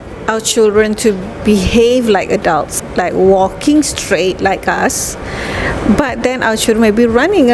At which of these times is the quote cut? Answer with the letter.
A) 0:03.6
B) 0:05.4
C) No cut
C